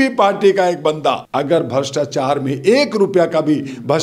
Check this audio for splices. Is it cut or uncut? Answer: cut